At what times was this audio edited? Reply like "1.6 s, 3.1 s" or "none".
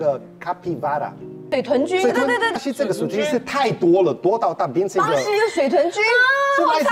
1.4 s, 2.6 s